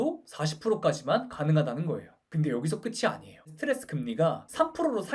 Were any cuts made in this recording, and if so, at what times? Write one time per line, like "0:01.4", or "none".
0:02.2
0:03.5